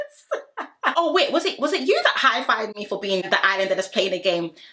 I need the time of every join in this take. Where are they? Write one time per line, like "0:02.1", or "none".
0:00.9
0:03.3